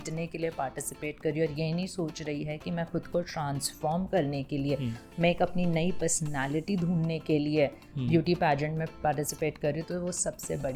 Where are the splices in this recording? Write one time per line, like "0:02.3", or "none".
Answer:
none